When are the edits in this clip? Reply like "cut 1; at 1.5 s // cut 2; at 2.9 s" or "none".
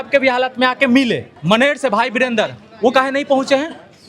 cut 1; at 1.3 s